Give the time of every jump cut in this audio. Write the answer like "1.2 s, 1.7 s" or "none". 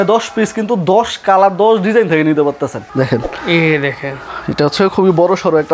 2.8 s